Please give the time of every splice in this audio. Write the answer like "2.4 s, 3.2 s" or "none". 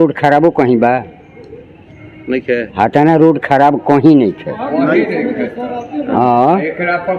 none